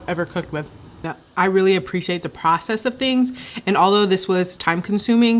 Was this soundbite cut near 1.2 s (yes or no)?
yes